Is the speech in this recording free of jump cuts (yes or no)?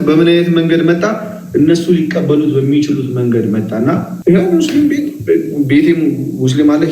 no